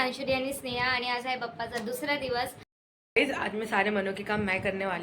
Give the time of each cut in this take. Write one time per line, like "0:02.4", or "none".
0:02.8